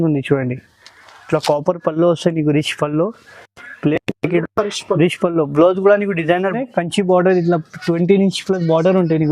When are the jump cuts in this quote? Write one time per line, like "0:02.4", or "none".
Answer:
0:06.6